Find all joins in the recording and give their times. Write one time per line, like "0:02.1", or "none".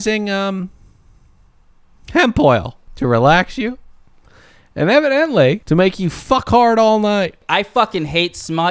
0:02.8
0:05.6
0:07.4